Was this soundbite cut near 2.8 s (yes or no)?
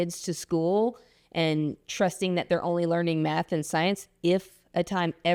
no